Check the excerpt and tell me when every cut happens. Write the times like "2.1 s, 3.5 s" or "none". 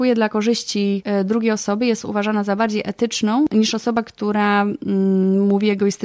1.0 s, 3.5 s